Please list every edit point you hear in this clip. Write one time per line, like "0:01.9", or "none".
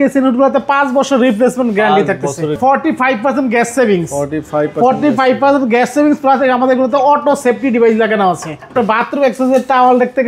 0:02.6
0:08.7

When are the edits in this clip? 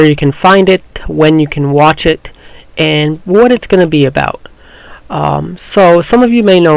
0:02.7

